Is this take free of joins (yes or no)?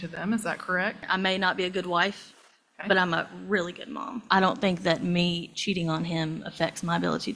no